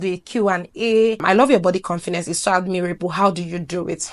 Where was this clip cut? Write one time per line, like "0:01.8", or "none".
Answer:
0:01.2